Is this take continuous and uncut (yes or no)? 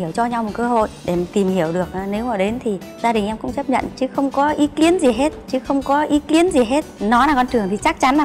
yes